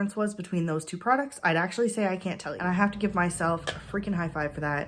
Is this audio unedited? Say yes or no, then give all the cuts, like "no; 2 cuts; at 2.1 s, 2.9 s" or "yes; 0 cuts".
no; 1 cut; at 2.5 s